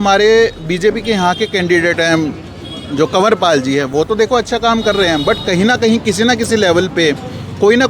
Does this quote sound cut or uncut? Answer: uncut